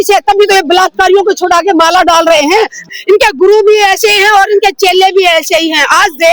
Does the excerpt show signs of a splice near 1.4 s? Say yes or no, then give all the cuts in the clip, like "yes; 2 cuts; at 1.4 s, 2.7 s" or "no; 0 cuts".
no; 1 cut; at 2.8 s